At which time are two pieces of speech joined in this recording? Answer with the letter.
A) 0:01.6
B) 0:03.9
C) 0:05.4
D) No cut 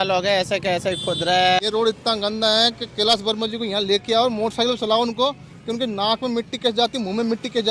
A